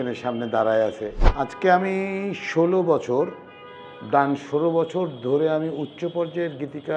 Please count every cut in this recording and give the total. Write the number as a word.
one